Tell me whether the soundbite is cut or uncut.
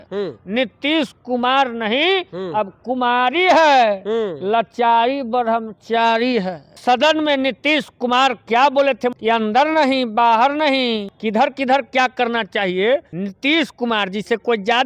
cut